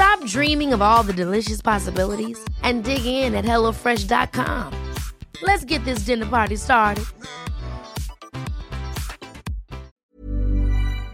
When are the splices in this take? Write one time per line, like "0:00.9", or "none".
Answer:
0:10.0